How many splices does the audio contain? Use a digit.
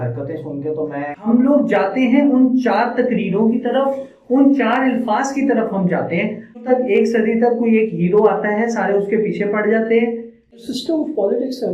3